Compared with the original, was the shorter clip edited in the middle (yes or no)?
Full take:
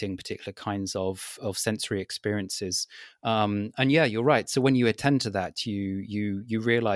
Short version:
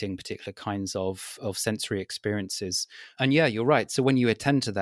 yes